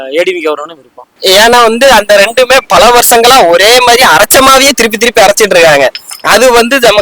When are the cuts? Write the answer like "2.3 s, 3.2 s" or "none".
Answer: 1.1 s